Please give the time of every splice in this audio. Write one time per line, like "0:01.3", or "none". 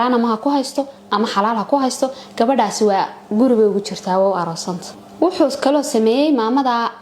none